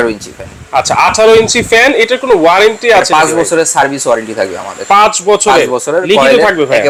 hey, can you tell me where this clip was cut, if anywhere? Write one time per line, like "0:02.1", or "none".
none